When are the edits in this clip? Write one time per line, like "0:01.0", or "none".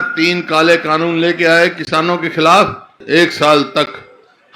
0:02.9